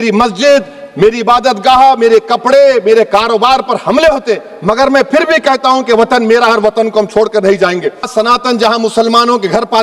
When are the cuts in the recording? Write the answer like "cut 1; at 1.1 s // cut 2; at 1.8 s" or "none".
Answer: cut 1; at 8.1 s